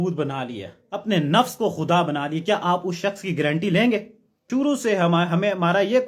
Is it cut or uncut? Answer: cut